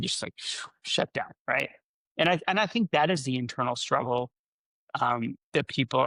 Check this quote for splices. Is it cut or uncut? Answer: uncut